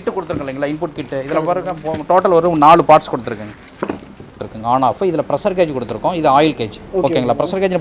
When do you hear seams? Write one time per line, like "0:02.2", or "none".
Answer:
0:04.4

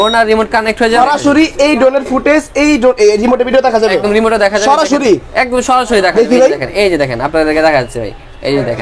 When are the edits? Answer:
0:01.0

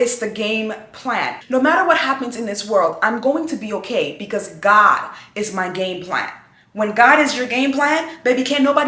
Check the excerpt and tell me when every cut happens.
0:01.4

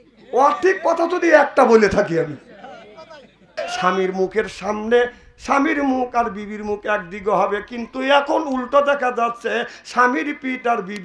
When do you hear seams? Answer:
0:03.6

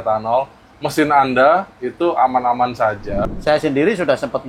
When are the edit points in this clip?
0:03.2

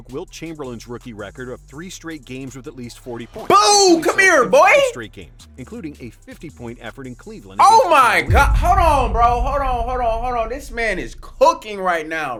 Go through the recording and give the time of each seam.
none

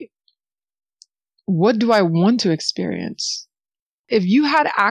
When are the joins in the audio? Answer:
0:04.0

